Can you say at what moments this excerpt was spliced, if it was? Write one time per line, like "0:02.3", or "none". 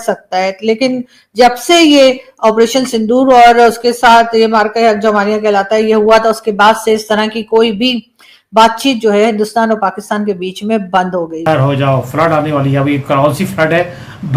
0:11.5

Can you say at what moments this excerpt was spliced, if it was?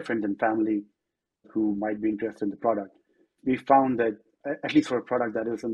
0:01.5
0:03.4
0:04.4

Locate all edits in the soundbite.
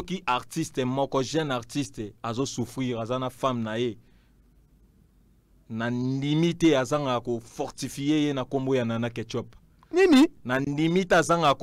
none

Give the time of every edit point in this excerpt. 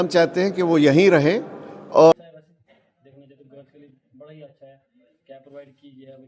0:02.1

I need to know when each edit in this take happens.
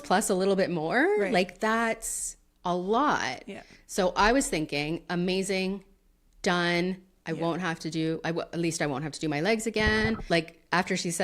0:10.2

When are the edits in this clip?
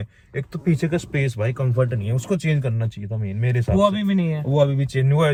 none

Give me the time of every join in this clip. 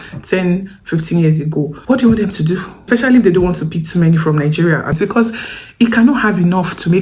0:01.8
0:02.7
0:05.0

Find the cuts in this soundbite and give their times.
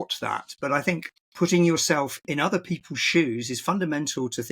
0:01.2
0:02.2

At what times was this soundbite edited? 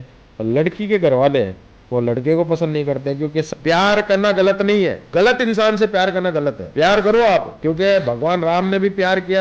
0:03.5
0:05.0
0:06.6
0:07.5

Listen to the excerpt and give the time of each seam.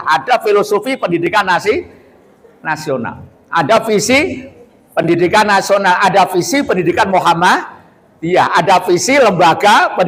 none

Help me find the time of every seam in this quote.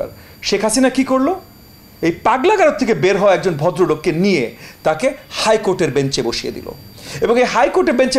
0:06.8

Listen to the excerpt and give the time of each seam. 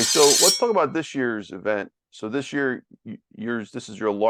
none

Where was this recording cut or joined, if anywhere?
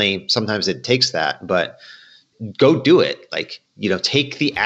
0:02.3

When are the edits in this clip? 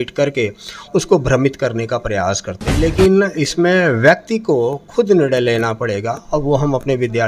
0:02.9

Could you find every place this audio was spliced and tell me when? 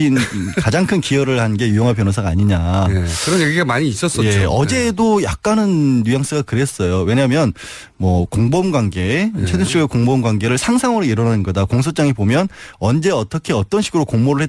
none

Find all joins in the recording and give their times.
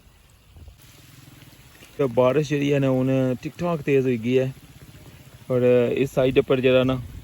0:02.0

